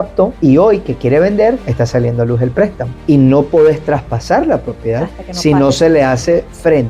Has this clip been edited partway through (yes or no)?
yes